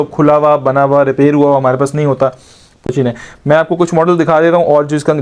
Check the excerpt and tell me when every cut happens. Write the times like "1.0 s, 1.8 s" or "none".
2.9 s